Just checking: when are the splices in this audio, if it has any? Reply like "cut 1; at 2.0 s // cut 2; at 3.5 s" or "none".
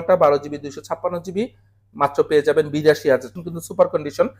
cut 1; at 3.3 s